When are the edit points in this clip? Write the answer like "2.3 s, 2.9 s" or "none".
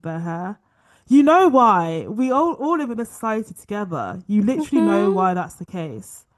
none